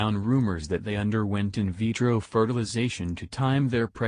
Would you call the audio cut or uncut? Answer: cut